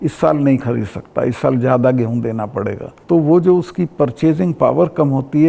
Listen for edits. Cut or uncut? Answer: uncut